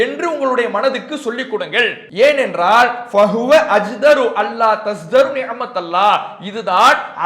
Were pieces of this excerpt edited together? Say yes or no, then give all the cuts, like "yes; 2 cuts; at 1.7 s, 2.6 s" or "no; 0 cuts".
yes; 1 cut; at 2.0 s